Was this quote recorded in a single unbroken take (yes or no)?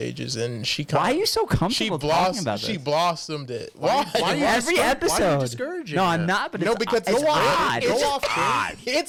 yes